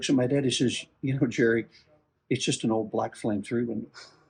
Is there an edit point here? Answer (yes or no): no